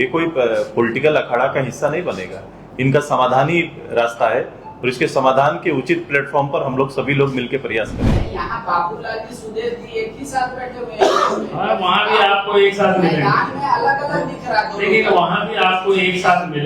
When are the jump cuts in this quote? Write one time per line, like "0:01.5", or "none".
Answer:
0:08.2